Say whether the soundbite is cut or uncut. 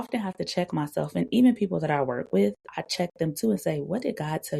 uncut